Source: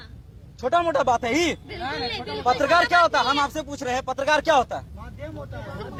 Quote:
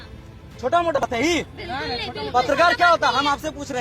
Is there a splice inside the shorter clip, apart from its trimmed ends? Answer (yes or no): yes